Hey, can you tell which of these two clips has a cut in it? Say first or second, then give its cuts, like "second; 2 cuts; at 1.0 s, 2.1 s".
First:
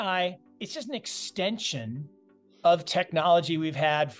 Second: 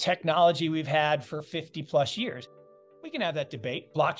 second; 1 cut; at 2.4 s